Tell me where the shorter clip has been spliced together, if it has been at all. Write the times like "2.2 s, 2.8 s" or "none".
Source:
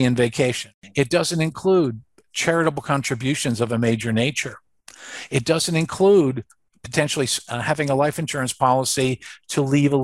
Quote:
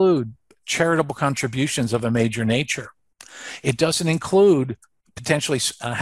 none

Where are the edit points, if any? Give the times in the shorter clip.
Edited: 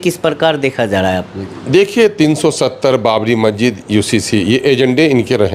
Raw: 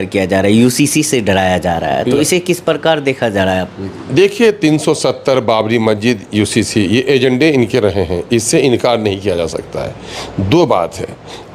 none

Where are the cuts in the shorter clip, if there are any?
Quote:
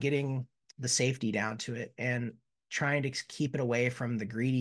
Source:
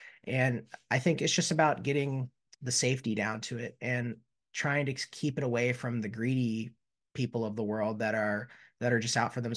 none

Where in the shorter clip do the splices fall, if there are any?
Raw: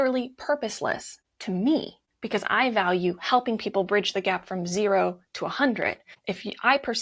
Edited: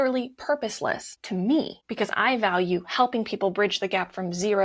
1.1 s, 1.8 s

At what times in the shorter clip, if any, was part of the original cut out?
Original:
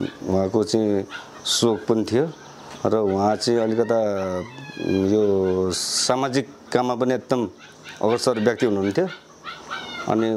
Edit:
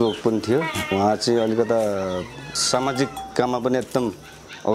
0.9 s, 2.5 s

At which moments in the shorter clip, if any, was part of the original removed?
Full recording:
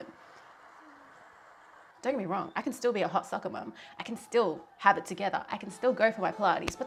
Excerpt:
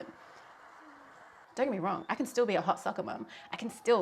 1.4 s

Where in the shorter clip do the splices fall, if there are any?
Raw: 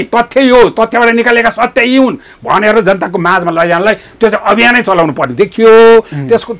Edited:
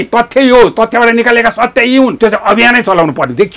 2.1 s

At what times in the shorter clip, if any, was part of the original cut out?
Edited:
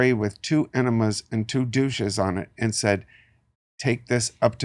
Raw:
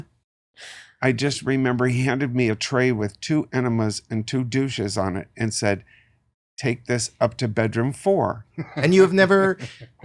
none

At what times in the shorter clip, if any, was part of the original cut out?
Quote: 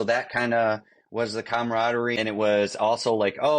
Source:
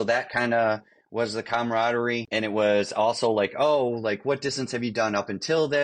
2.1 s

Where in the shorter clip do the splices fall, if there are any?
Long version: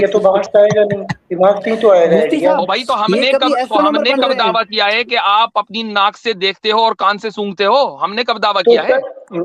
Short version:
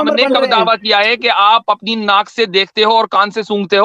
none

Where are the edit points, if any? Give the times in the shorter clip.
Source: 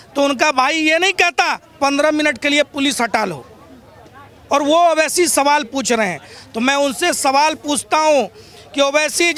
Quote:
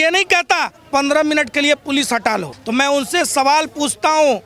2.5 s

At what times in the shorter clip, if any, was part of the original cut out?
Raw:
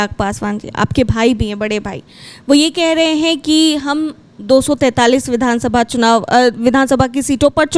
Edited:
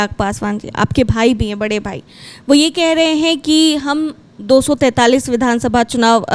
none

